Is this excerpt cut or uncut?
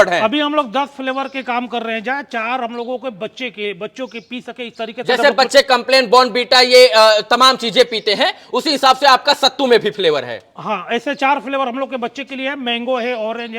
uncut